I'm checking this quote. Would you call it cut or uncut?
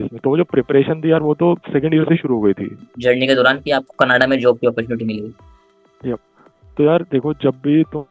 cut